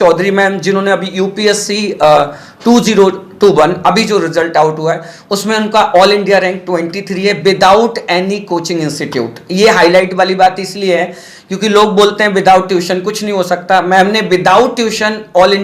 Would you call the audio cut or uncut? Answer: uncut